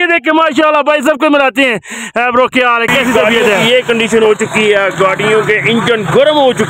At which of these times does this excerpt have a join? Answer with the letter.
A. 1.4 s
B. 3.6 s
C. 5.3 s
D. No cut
B